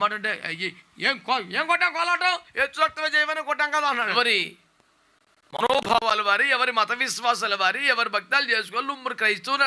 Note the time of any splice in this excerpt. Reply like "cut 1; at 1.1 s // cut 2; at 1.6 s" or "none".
cut 1; at 4.1 s